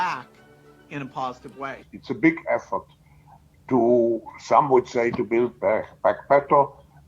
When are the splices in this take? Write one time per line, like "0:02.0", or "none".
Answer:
0:01.9